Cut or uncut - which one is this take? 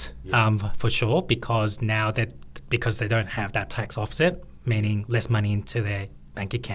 uncut